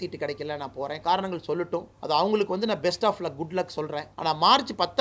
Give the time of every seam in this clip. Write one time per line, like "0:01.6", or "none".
0:01.9
0:04.1